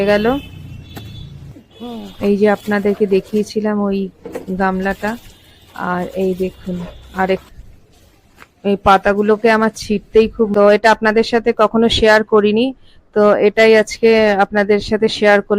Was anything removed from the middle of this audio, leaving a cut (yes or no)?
yes